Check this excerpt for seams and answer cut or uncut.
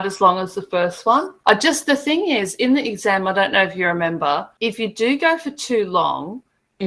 cut